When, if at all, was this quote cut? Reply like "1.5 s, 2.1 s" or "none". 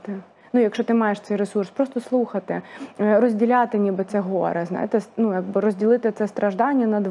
none